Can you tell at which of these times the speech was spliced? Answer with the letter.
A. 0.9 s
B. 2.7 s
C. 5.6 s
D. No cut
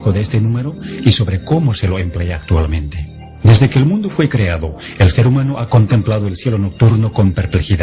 C